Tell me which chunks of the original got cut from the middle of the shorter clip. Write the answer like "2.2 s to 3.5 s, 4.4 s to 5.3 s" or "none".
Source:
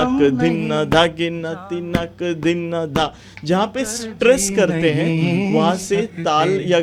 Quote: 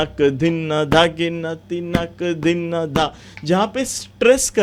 none